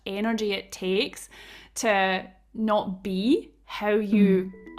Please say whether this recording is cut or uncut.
uncut